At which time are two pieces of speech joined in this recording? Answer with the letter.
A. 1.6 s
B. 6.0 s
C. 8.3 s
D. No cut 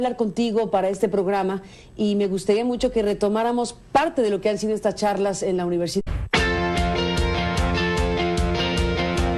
D